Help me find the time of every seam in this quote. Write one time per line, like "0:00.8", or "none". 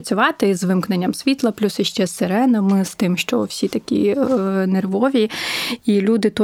none